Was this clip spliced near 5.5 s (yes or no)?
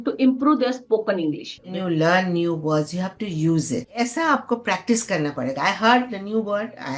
no